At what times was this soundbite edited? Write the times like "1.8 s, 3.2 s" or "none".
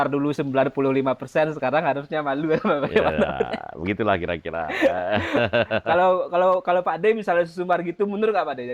none

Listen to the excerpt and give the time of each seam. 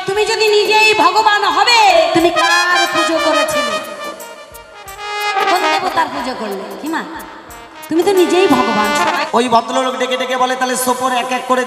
1.9 s, 9.2 s

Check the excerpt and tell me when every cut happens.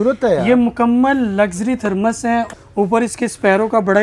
2.6 s

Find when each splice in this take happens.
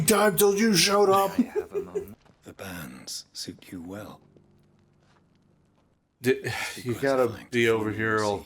2.3 s

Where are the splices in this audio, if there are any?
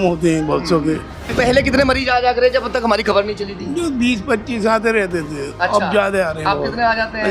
1.3 s

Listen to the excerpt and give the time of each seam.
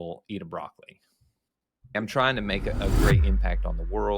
2.0 s

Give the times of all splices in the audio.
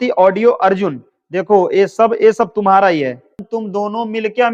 3.4 s

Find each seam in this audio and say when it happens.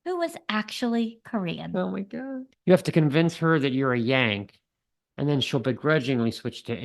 2.4 s

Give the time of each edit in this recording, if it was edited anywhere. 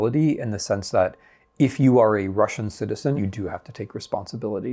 3.2 s

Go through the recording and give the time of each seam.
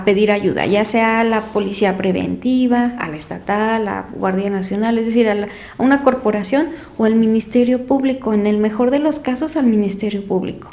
none

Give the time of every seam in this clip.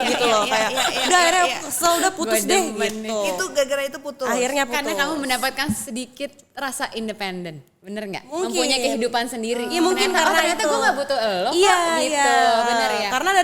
none

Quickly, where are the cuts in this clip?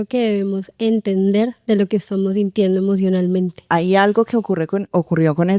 1.6 s, 3.6 s

